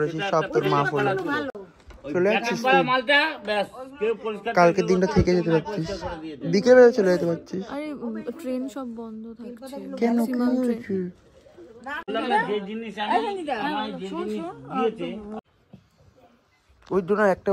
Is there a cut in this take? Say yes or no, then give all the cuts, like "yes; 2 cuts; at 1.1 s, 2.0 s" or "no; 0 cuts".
no; 0 cuts